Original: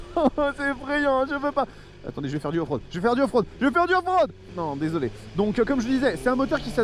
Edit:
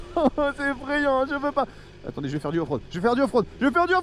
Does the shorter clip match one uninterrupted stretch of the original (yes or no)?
yes